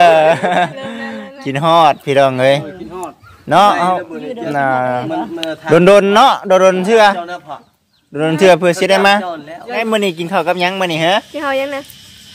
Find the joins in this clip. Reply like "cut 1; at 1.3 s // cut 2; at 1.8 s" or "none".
cut 1; at 9.8 s